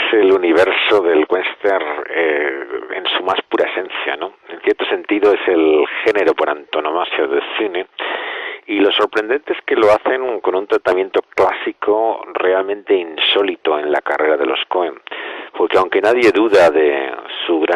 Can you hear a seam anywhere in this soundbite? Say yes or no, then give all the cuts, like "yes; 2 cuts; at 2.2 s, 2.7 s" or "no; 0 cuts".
yes; 1 cut; at 4.9 s